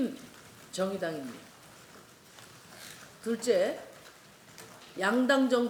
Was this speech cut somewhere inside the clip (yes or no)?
no